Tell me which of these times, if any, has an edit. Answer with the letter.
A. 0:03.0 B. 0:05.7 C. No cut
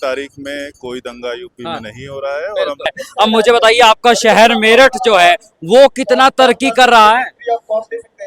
A